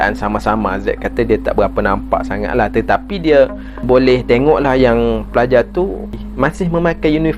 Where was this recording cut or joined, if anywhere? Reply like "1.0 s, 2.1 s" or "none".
3.8 s, 6.2 s